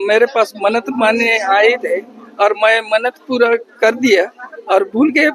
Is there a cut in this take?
no; 0 cuts

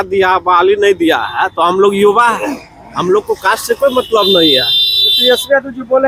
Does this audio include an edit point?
no; 0 cuts

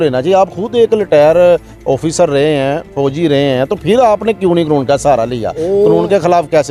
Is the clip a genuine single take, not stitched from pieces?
yes; 0 cuts

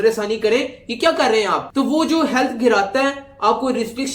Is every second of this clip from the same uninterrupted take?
yes; 0 cuts

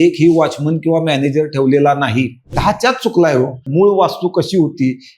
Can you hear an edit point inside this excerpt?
yes; 2 cuts; at 2.6 s, 3.6 s

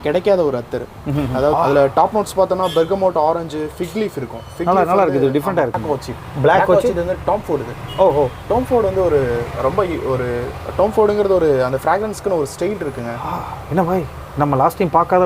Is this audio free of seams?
no; 2 cuts; at 1.5 s, 5.8 s

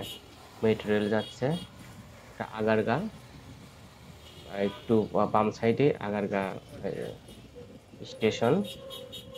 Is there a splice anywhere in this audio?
no; 0 cuts

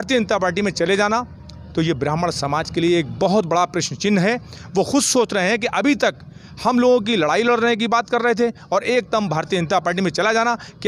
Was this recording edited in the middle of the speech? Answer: no; 0 cuts

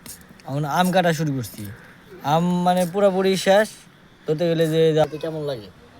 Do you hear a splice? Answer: yes; 1 cut; at 5.0 s

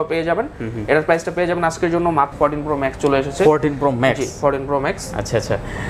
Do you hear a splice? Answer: yes; 1 cut; at 2.3 s

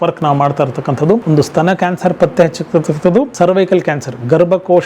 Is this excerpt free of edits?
no; 2 cuts; at 1.2 s, 3.3 s

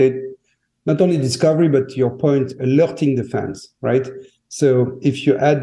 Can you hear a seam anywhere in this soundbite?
no; 0 cuts

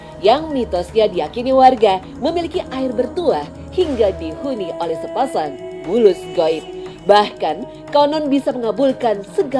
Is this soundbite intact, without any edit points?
yes; 0 cuts

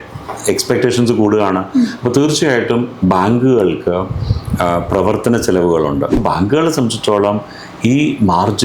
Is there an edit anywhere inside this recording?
yes; 1 cut; at 6.2 s

